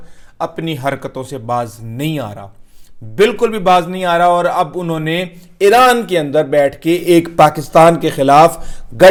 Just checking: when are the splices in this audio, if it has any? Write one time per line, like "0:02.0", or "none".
none